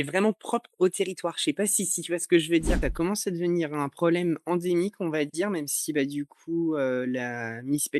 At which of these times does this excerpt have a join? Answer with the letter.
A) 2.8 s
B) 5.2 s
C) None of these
A